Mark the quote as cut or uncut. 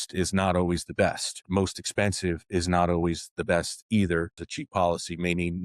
cut